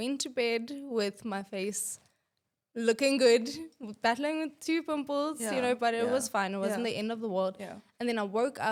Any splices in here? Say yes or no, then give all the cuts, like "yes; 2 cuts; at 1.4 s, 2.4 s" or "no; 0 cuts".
no; 0 cuts